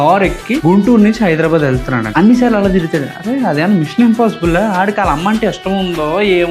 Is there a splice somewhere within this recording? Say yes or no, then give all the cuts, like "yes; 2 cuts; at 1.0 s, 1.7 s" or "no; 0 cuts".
no; 0 cuts